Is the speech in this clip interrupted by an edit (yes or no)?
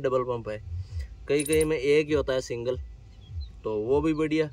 no